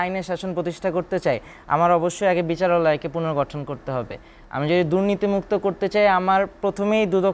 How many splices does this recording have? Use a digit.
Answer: 0